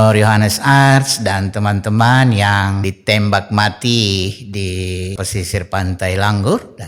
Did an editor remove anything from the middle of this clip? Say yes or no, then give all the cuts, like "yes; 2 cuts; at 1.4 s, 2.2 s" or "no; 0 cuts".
yes; 2 cuts; at 2.9 s, 5.1 s